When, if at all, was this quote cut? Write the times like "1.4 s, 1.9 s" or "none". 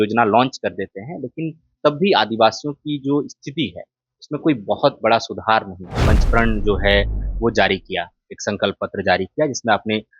6.1 s